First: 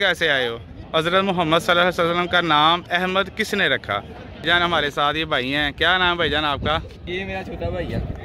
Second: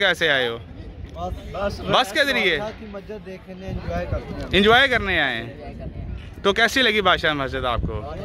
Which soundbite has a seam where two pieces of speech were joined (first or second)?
first